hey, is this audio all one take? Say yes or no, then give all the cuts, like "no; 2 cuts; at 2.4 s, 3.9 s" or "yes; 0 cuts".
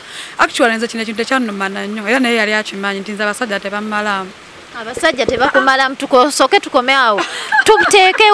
yes; 0 cuts